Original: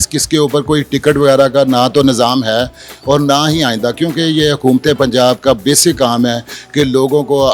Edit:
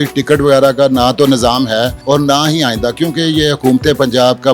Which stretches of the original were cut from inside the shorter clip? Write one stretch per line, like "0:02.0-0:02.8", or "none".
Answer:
0:02.7-0:03.0